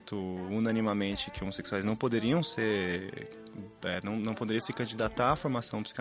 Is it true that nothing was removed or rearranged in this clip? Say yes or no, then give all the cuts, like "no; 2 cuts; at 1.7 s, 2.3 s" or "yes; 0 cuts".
yes; 0 cuts